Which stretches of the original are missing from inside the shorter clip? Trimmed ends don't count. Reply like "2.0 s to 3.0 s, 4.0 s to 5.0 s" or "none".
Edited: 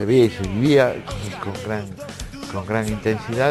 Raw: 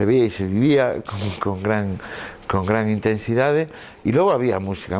none